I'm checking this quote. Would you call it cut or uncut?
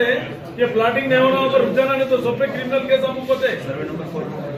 uncut